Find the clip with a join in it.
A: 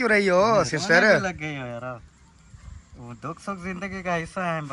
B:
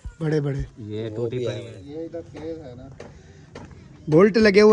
B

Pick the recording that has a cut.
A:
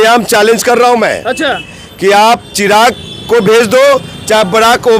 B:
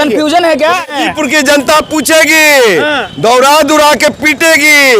B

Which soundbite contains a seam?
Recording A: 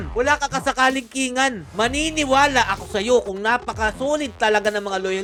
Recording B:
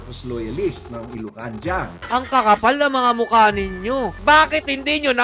B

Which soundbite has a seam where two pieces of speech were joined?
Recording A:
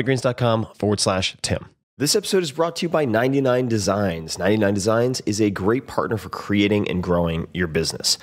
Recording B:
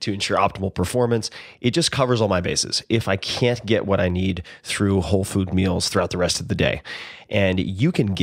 A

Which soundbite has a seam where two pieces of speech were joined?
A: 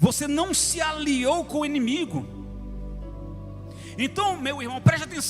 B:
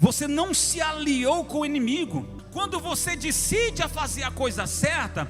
B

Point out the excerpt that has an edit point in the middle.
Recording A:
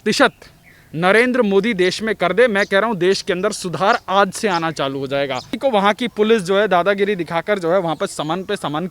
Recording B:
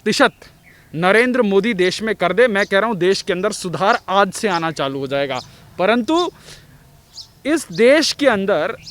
A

